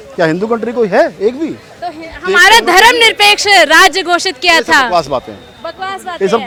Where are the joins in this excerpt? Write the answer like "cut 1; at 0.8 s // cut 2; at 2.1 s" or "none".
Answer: none